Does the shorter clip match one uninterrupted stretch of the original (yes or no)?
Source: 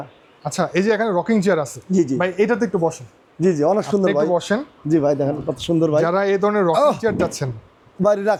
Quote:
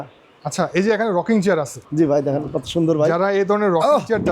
no